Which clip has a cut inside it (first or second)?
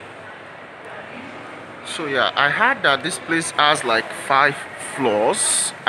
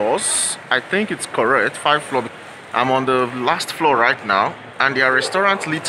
second